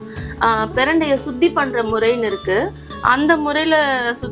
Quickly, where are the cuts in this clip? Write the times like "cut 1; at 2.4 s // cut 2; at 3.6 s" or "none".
cut 1; at 2.9 s

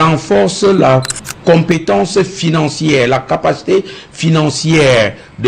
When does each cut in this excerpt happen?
none

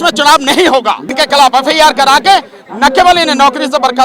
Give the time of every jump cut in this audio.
cut 1; at 1.0 s

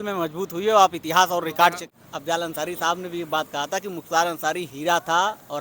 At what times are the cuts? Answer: cut 1; at 1.9 s

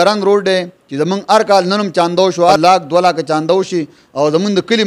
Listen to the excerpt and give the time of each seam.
cut 1; at 2.6 s

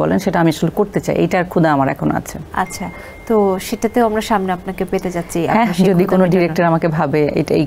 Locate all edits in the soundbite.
none

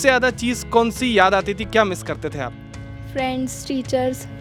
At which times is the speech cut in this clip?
none

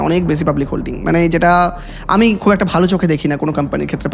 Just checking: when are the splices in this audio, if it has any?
none

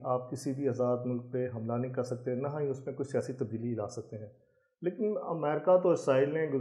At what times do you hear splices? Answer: none

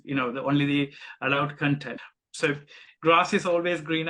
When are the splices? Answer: cut 1; at 2.0 s

